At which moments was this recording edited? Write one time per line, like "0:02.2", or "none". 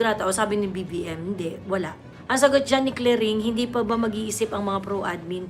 none